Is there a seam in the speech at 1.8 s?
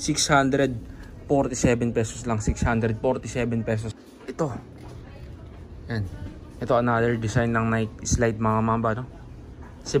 no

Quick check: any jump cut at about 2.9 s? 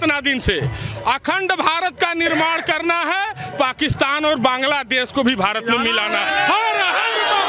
no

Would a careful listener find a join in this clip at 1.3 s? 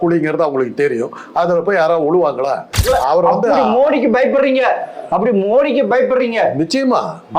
no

